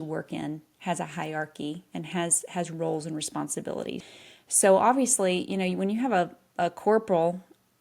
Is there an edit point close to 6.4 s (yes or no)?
no